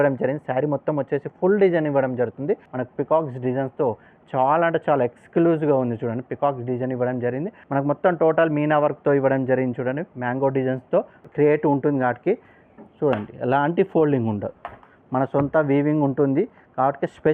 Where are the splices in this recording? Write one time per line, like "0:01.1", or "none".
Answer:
0:02.7
0:07.6
0:11.3